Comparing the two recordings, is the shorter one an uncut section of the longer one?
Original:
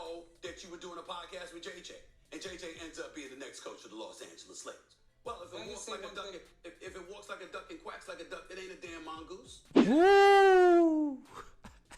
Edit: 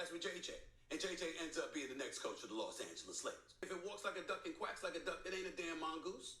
no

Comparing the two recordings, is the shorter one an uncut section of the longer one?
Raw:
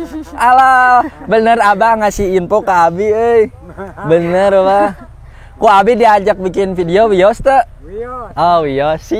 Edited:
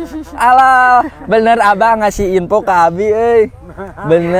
yes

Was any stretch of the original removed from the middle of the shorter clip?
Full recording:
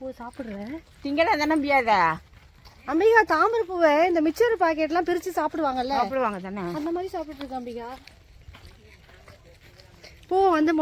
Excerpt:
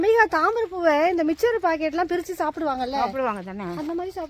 no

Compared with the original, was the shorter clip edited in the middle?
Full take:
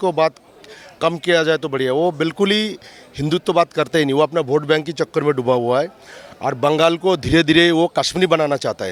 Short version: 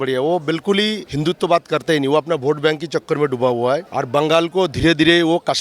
yes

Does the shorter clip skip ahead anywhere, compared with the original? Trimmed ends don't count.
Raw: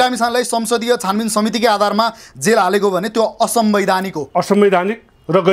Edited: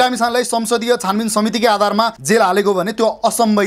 yes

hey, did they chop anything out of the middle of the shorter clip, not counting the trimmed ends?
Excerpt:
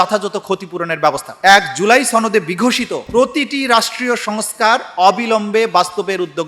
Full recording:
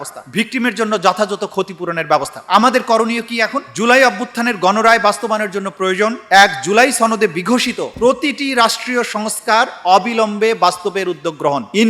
yes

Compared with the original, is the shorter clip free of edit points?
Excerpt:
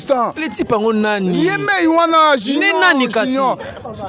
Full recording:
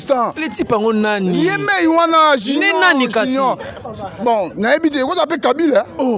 yes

